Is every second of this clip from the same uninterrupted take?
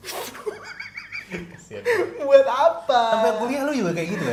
yes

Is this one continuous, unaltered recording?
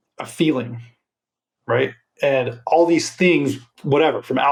yes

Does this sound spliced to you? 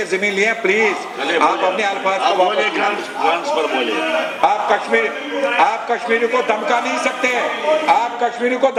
no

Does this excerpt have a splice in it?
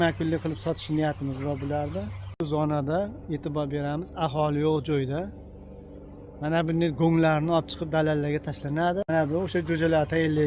yes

